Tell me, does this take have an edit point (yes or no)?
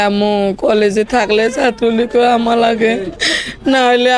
no